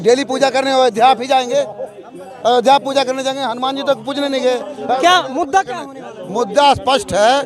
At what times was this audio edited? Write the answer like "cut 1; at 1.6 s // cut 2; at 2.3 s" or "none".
none